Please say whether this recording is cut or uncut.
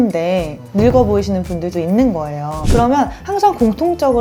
cut